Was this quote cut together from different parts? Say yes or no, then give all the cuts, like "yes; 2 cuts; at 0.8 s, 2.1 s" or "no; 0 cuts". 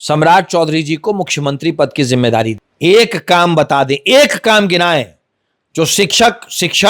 yes; 1 cut; at 2.6 s